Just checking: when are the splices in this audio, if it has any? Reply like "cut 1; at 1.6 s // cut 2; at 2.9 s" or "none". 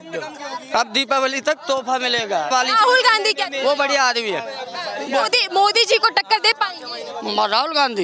cut 1; at 2.5 s